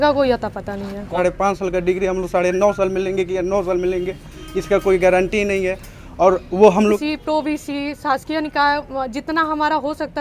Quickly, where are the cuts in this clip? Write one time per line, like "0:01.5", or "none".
0:01.2
0:06.7